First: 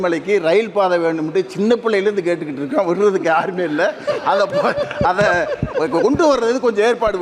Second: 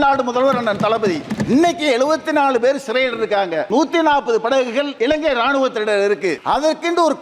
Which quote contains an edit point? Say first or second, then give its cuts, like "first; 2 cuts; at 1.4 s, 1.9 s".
second; 4 cuts; at 1.3 s, 3.7 s, 4.9 s, 6.4 s